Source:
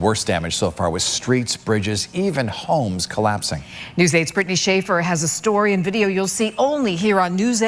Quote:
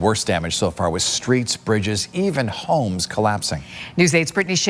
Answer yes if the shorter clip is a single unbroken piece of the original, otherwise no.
yes